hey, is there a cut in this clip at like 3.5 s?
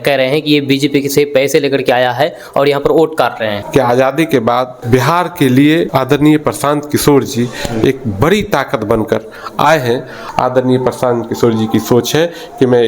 yes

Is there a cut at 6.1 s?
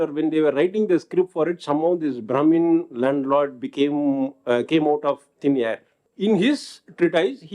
yes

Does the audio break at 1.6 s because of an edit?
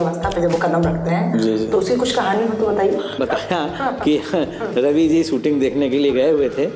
no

